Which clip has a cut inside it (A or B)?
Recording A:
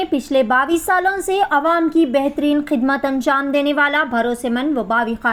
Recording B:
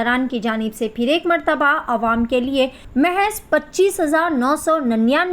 B